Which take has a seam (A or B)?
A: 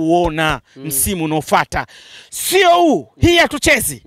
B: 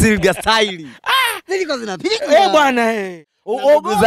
B